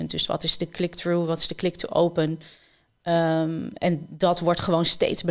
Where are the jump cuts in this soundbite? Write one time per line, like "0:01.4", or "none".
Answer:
none